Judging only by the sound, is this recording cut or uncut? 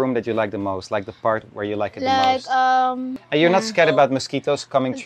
cut